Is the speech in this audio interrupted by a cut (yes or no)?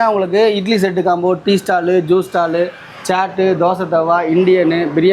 no